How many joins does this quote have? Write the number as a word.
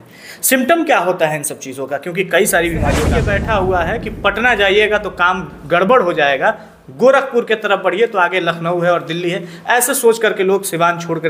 one